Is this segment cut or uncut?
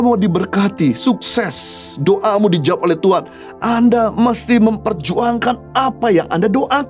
uncut